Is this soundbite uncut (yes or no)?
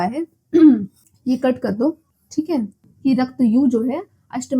no